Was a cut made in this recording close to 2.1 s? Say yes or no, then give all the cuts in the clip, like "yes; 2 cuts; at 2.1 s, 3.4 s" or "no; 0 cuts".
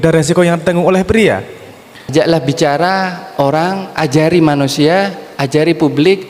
yes; 1 cut; at 2.1 s